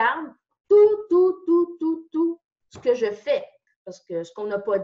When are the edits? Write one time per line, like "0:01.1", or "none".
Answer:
0:03.6